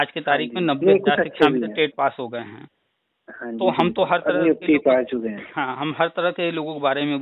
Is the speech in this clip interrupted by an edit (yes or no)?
no